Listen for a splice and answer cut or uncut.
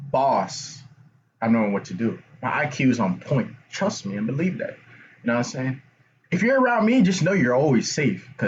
uncut